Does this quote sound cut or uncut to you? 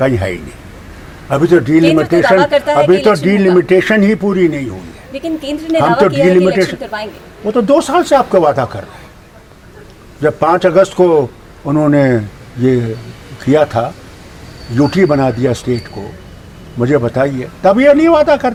uncut